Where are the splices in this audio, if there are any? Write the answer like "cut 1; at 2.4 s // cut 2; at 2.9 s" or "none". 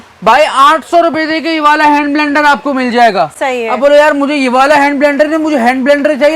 none